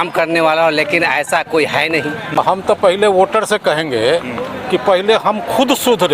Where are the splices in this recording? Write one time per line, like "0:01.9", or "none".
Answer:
0:02.4